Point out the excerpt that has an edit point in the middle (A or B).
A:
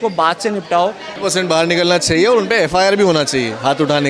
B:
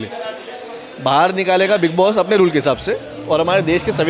A